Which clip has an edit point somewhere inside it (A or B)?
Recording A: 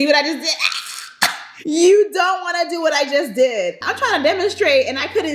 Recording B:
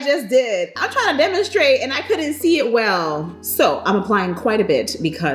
B